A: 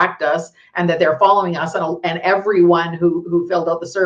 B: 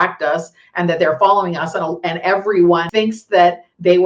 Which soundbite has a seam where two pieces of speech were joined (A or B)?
B